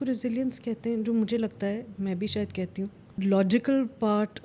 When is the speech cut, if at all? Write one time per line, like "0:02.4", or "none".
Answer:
0:03.1

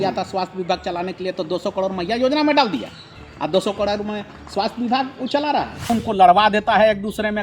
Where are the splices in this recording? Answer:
0:05.9

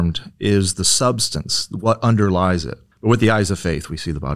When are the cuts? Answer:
0:02.8

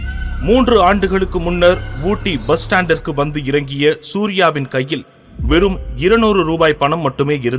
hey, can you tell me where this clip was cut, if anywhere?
none

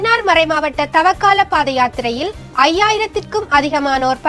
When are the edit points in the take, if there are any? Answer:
none

